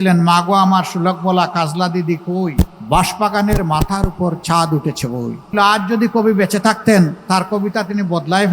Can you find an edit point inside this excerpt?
yes; 2 cuts; at 2.8 s, 5.5 s

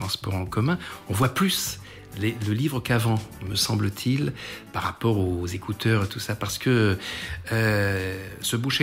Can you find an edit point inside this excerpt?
no; 0 cuts

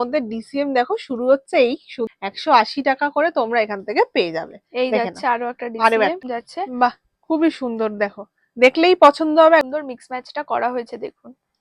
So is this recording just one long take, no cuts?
no; 3 cuts; at 2.1 s, 6.2 s, 9.7 s

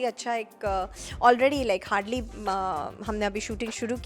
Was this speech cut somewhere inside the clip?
no; 0 cuts

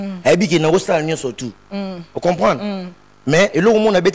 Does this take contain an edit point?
no; 0 cuts

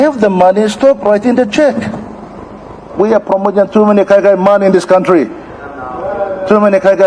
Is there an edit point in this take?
yes; 1 cut; at 2.9 s

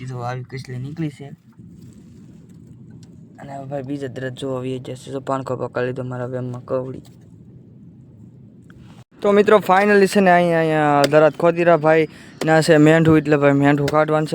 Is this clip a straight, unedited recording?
yes; 0 cuts

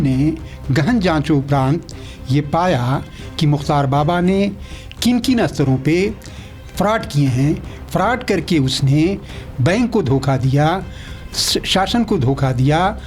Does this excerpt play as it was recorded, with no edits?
yes; 0 cuts

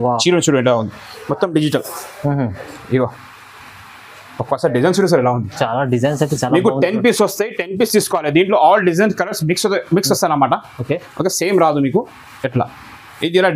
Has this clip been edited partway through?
no; 0 cuts

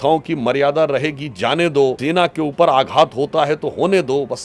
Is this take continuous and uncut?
no; 1 cut; at 2.0 s

